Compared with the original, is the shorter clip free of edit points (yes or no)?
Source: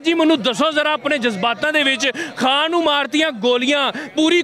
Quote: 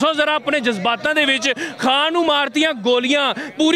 yes